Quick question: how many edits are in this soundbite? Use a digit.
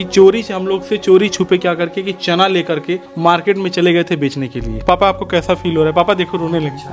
2